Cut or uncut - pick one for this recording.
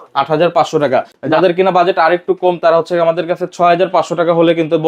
uncut